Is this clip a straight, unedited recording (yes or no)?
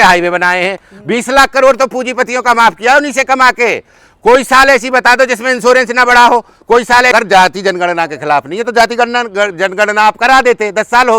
no